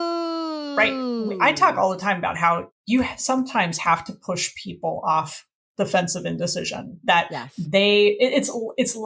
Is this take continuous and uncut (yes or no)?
no